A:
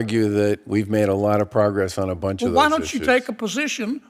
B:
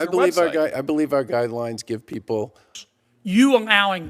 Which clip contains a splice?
B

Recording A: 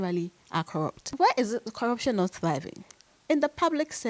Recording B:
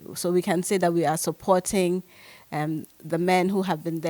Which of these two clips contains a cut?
A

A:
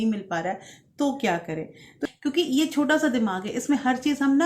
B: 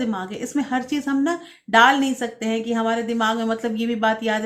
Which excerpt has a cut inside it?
A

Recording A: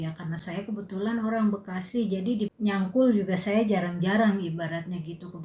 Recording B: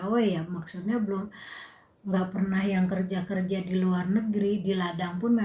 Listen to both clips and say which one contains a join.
A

